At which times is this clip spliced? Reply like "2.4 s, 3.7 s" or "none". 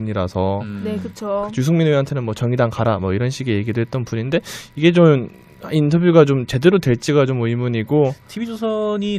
none